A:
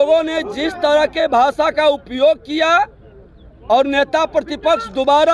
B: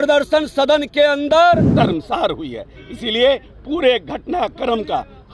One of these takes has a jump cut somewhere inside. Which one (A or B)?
B